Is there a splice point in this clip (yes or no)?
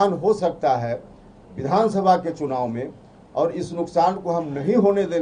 no